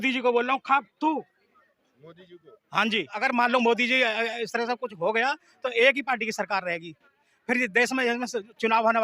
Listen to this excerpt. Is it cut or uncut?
cut